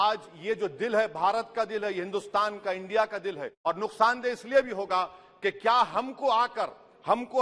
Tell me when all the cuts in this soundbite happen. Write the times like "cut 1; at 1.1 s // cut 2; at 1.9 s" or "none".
cut 1; at 3.5 s